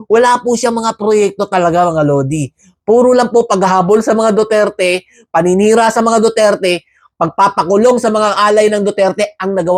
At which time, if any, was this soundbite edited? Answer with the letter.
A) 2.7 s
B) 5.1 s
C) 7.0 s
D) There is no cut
D